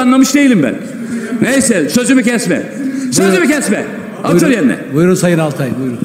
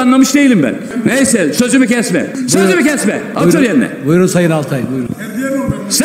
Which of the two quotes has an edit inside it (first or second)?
second